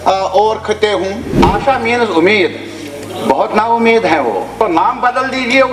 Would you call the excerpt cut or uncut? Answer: cut